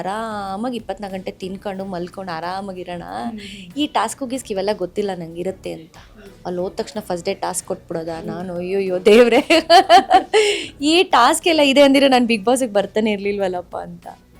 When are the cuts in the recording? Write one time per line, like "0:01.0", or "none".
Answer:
none